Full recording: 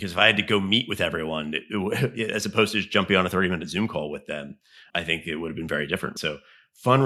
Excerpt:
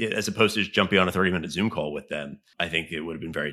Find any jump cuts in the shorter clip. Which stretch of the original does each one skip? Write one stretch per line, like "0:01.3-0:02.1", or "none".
0:04.6-0:04.7